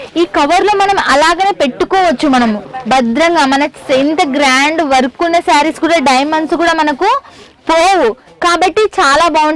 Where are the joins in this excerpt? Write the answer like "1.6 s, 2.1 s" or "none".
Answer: none